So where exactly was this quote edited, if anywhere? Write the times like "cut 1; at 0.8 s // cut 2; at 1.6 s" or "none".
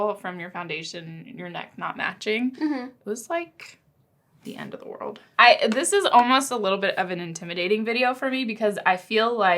cut 1; at 5.2 s